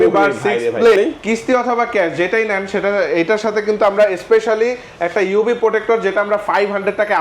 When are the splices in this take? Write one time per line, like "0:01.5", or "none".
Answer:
0:01.0